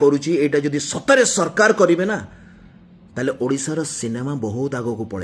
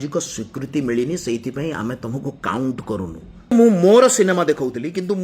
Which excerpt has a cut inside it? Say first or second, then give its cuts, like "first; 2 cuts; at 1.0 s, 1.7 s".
second; 1 cut; at 3.5 s